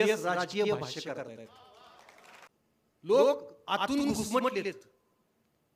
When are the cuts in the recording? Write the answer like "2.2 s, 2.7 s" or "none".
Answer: 3.1 s